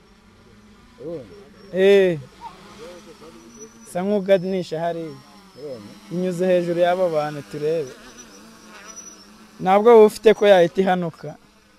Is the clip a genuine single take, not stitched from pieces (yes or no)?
yes